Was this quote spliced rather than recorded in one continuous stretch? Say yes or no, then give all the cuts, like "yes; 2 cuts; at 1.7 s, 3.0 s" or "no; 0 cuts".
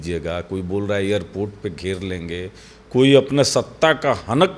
no; 0 cuts